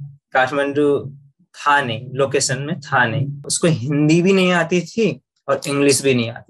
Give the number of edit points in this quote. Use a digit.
1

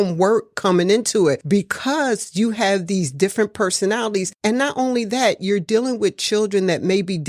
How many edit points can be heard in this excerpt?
2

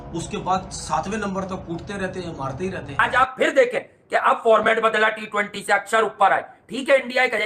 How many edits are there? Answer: 1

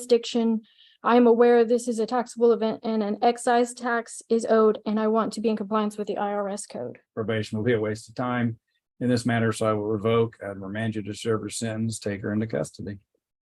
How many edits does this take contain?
1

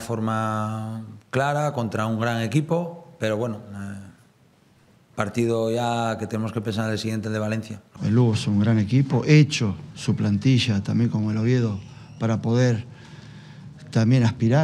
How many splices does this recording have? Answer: 1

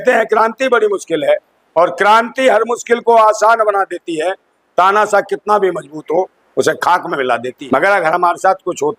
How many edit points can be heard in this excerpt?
1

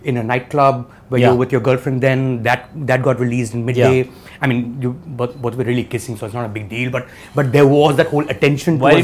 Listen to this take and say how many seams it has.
0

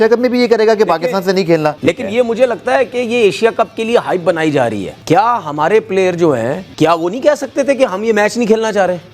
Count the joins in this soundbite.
3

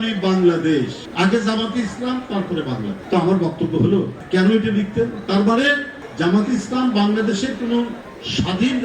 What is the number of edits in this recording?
2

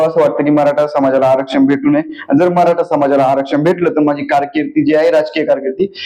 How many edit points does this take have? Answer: 0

